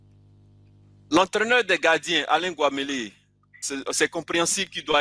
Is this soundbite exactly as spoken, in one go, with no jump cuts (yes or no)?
no